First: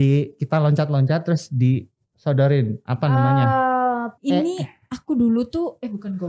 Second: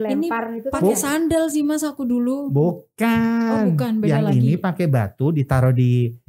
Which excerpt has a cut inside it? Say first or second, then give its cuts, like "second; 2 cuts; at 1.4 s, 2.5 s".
first; 1 cut; at 4.1 s